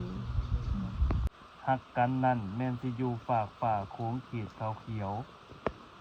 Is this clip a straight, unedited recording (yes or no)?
no